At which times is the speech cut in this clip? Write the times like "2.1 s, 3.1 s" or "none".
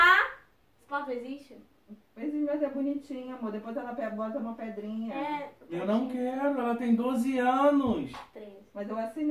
none